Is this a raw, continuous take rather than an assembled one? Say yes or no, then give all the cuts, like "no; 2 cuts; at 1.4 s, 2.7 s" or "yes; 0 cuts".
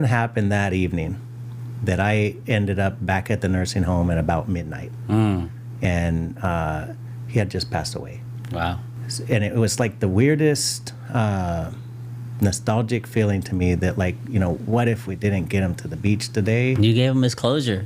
yes; 0 cuts